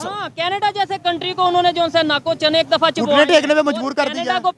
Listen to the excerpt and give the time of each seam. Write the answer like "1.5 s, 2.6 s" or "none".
none